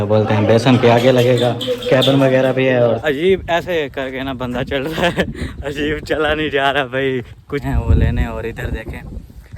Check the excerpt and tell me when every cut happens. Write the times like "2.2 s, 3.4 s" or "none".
3.0 s, 7.6 s